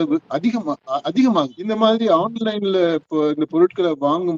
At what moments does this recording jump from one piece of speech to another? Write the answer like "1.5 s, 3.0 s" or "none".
1.6 s